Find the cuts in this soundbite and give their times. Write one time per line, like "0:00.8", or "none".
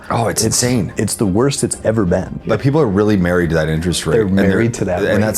0:02.4